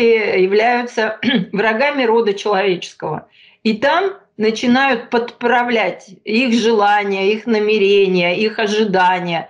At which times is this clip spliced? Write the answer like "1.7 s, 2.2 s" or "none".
none